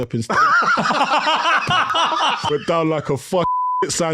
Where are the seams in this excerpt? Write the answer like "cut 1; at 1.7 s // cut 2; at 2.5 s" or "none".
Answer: cut 1; at 2.4 s

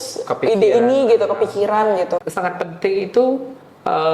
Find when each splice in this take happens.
cut 1; at 2.3 s

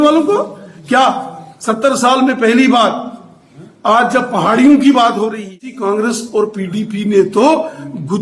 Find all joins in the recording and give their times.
cut 1; at 5.8 s

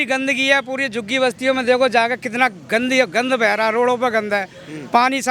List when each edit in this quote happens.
none

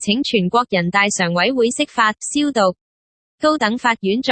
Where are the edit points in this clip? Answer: cut 1; at 2.4 s

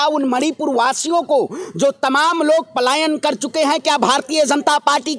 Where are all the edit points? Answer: none

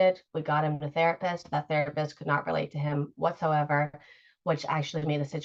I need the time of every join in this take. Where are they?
none

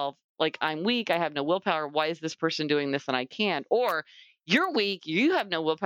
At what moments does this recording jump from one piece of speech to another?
none

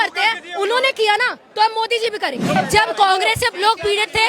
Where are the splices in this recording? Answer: cut 1; at 2.5 s

